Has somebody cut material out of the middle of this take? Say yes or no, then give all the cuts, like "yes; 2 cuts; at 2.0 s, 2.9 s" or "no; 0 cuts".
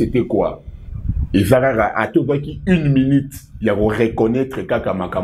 no; 0 cuts